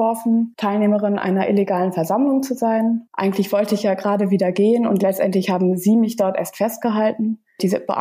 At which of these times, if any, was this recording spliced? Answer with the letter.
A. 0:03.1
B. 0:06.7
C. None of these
A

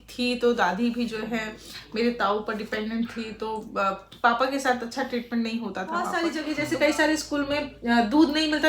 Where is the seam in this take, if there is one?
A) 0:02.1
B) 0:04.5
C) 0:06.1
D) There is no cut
C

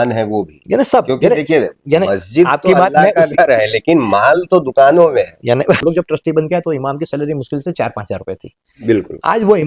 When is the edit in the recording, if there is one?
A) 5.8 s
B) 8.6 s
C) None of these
A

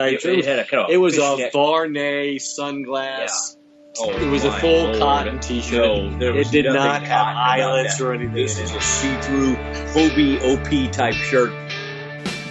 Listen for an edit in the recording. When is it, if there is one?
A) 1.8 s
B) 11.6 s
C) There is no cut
B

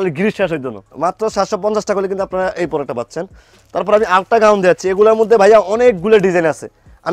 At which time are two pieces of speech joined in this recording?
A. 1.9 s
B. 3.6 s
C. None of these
C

